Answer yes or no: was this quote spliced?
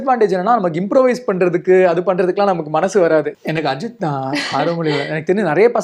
yes